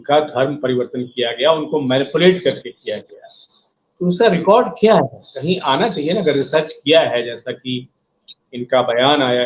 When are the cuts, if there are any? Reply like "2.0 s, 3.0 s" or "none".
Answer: none